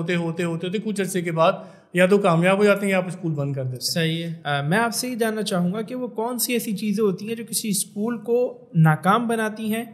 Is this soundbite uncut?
no; 1 cut; at 4.3 s

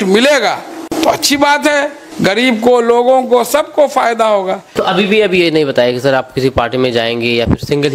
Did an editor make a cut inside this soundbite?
yes; 3 cuts; at 0.9 s, 2.0 s, 4.7 s

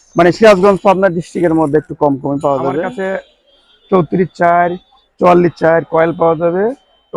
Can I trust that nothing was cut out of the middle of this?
no; 1 cut; at 3.0 s

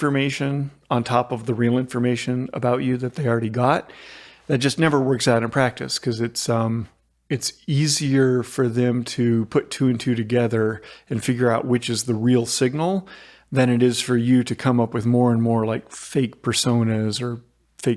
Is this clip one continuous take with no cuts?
yes; 0 cuts

